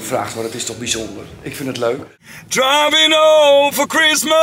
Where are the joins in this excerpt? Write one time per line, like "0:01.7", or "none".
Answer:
0:02.2